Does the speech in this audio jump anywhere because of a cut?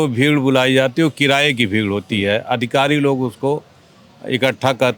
no; 0 cuts

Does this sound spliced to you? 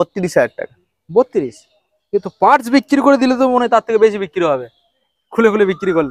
no; 0 cuts

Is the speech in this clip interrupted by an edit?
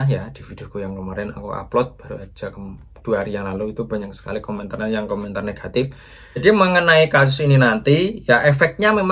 yes; 1 cut; at 6.4 s

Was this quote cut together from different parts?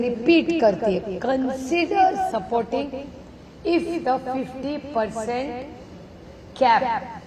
no; 0 cuts

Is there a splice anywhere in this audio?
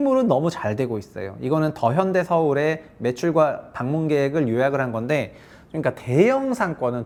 no; 0 cuts

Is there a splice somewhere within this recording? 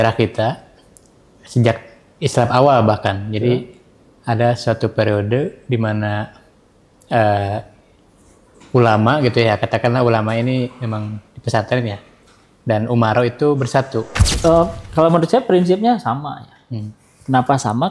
yes; 1 cut; at 14.2 s

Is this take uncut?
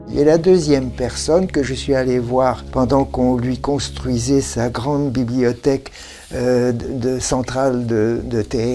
yes; 0 cuts

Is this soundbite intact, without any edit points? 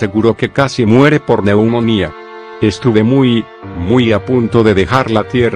yes; 0 cuts

